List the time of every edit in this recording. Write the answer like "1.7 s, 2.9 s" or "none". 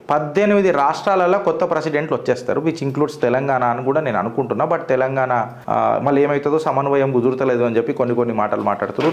5.6 s

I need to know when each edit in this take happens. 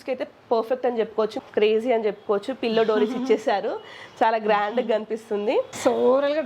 1.4 s

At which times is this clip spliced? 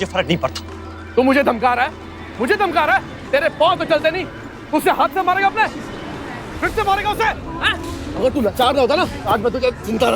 1.0 s

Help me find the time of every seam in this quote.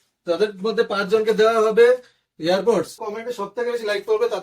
3.0 s

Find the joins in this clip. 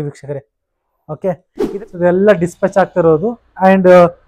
1.6 s

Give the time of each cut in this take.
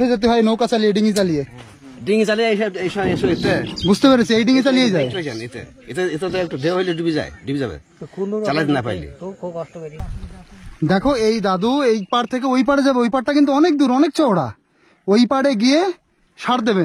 10.0 s

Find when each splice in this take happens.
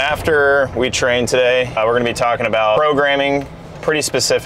1.8 s, 2.8 s

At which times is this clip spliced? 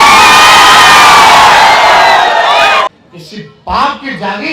2.9 s

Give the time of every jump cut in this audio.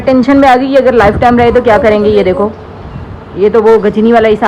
none

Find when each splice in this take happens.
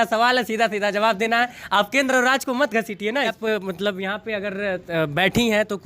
3.3 s

